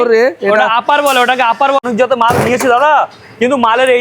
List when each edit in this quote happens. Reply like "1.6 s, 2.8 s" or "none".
1.8 s